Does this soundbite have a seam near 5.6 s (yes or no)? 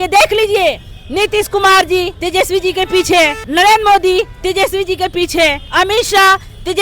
yes